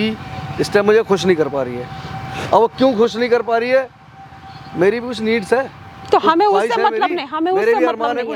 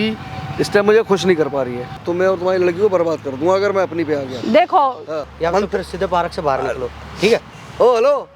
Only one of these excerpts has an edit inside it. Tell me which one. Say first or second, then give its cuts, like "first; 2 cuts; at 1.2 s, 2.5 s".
second; 2 cuts; at 2.0 s, 5.3 s